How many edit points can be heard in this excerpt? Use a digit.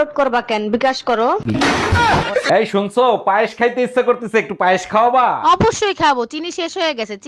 1